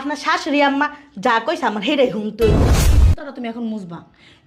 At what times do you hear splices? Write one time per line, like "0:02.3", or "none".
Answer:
0:02.9